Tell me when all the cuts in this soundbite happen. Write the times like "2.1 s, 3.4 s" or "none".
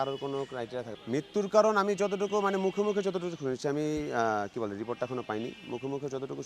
0.9 s